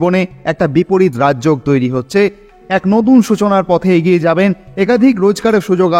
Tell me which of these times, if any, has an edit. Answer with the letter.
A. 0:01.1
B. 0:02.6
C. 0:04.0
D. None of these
B